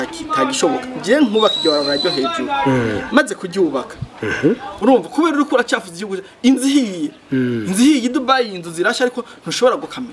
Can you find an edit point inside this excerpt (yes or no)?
yes